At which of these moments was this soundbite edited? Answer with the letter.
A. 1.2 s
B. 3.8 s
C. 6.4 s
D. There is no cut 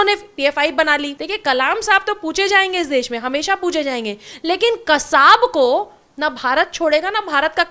A